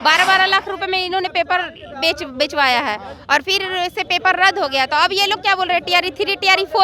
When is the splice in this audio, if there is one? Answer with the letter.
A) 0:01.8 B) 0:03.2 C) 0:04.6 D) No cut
D